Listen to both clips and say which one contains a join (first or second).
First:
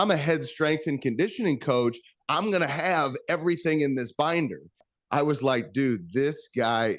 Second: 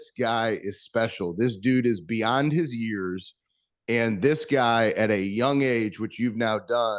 first